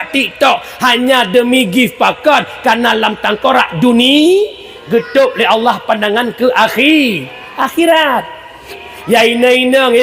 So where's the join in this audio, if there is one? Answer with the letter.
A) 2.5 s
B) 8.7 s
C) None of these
B